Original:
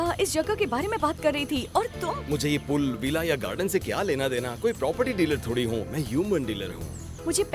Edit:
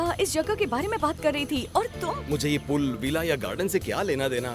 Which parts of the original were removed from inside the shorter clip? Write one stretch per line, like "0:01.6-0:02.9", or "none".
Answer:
none